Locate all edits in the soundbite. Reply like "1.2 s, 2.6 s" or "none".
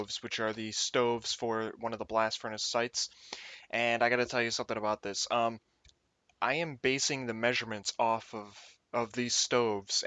2.5 s